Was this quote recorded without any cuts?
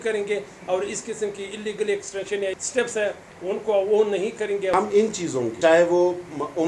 no; 3 cuts; at 2.5 s, 4.7 s, 5.6 s

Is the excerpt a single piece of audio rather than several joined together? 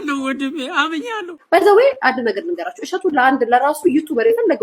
no; 1 cut; at 1.3 s

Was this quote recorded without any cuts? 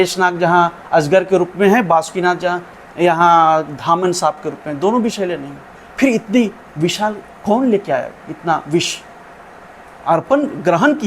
yes; 0 cuts

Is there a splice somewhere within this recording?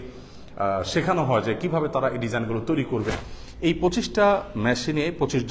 yes; 1 cut; at 3.1 s

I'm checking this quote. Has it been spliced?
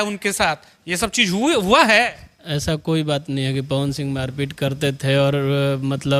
no; 0 cuts

